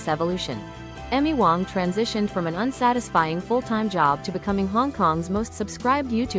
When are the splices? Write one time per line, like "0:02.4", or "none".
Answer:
none